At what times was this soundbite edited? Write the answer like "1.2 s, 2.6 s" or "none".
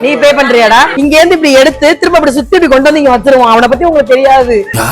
0.9 s